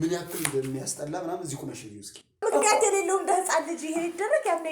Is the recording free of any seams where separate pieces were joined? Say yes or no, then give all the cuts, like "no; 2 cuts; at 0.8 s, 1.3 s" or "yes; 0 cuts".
no; 1 cut; at 2.4 s